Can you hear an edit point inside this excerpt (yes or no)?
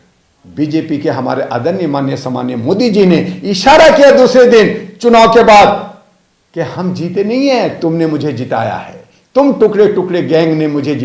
no